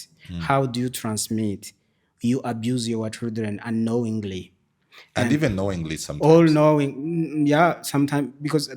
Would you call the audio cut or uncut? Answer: uncut